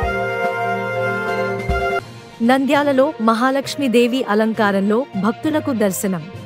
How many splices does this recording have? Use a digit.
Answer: 0